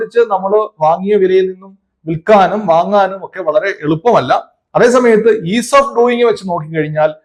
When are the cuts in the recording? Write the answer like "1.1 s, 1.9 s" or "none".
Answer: none